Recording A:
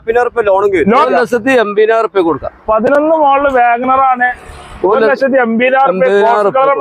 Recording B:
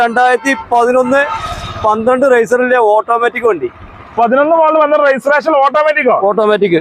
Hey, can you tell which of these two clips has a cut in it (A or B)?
A